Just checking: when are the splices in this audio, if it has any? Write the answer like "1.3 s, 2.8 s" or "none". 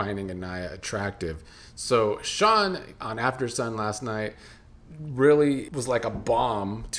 5.7 s